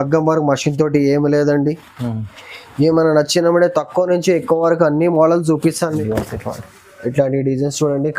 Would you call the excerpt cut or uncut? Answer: cut